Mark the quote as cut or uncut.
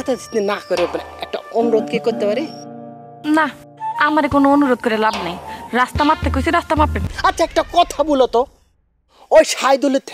cut